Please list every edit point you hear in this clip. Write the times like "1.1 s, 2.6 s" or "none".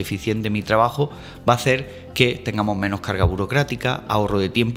none